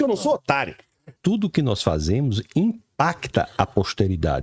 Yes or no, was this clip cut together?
yes